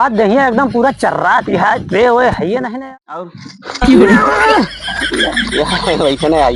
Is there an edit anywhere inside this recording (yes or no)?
yes